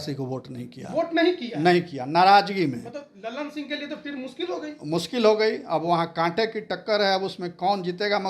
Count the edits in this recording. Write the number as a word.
zero